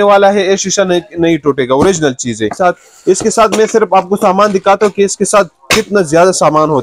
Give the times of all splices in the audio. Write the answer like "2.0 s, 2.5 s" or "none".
2.5 s